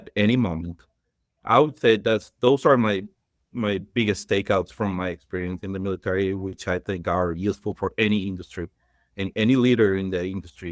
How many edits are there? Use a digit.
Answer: 0